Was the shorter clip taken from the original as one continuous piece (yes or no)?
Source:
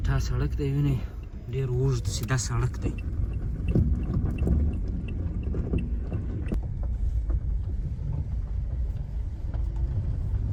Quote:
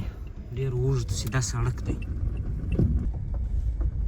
no